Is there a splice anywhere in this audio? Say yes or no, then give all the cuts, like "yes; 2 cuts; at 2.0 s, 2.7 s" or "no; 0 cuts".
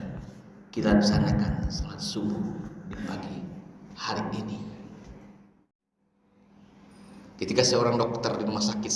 yes; 1 cut; at 5.5 s